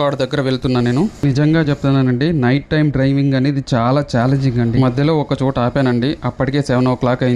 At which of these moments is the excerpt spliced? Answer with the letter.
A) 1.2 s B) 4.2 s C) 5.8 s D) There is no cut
A